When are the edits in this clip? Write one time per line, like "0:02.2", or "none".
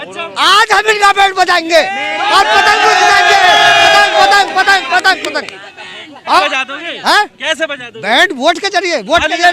0:06.4